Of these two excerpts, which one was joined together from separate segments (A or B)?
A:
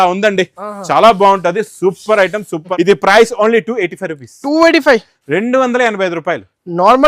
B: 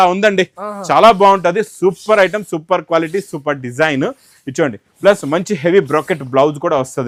A